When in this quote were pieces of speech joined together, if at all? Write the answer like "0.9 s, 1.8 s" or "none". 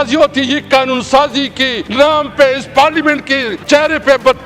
1.8 s, 3.5 s